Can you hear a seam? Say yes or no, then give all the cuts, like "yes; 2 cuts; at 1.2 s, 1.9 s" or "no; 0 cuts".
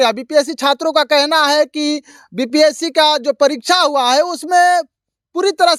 no; 0 cuts